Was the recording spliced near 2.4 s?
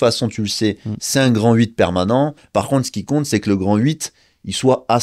yes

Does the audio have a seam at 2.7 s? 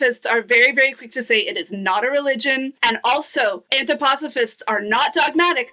yes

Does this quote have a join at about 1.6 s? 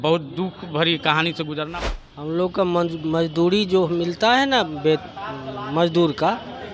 yes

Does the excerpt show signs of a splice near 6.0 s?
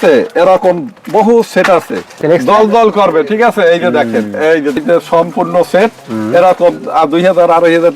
no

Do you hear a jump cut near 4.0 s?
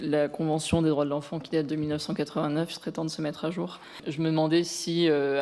yes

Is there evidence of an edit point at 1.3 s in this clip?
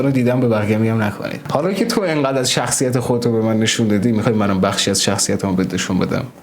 yes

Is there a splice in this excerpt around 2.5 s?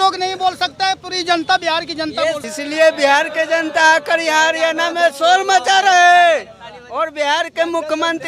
yes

